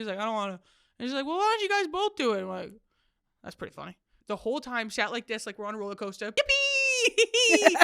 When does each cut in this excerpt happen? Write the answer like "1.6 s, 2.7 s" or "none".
4.1 s, 6.3 s